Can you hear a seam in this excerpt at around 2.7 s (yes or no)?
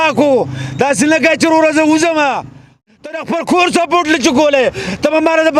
yes